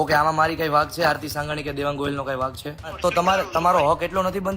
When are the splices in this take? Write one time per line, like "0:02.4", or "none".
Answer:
0:02.9